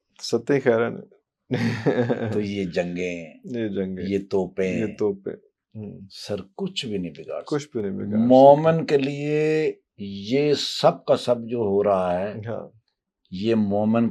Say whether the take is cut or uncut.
uncut